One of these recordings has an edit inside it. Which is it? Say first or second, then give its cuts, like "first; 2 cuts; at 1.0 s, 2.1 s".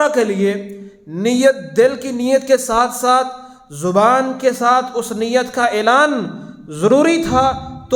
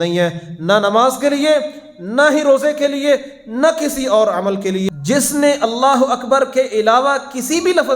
second; 1 cut; at 4.9 s